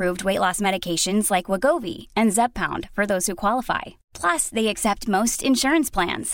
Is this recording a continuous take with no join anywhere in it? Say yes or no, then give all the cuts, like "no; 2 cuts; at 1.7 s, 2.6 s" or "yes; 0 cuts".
yes; 0 cuts